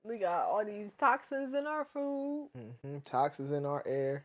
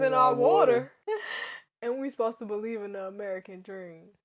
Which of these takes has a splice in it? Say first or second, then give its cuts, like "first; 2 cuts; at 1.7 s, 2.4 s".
second; 1 cut; at 0.9 s